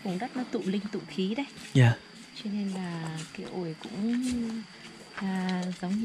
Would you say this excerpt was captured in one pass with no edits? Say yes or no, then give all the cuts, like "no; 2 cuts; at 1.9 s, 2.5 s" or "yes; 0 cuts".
yes; 0 cuts